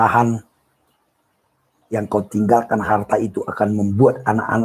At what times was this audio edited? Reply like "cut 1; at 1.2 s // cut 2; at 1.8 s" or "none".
cut 1; at 1.9 s